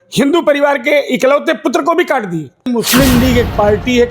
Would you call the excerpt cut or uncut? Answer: cut